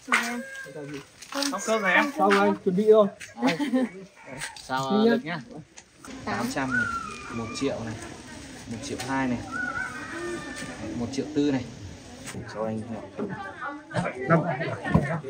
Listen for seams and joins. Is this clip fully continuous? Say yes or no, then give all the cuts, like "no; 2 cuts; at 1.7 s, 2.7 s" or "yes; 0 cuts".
no; 2 cuts; at 6.2 s, 12.4 s